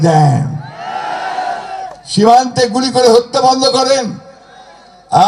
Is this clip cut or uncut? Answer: uncut